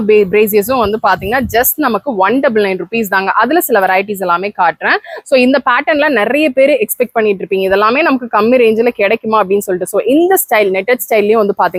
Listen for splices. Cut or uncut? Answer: uncut